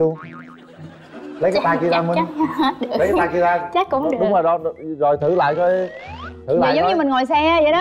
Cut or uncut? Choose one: uncut